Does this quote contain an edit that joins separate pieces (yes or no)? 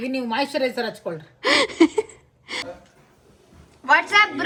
no